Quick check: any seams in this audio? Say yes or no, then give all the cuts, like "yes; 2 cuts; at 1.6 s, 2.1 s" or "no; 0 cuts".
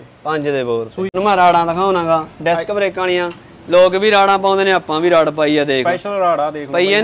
yes; 1 cut; at 1.1 s